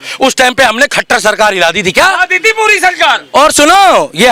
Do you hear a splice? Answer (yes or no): no